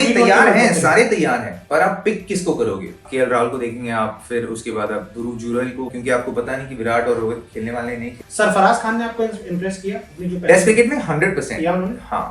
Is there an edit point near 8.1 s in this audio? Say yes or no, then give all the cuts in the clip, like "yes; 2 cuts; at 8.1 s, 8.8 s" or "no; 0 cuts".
yes; 3 cuts; at 3.1 s, 5.9 s, 8.1 s